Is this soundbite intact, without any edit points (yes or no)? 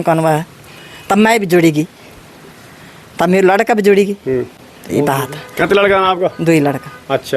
yes